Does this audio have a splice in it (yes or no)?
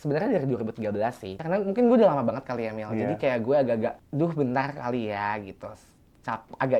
yes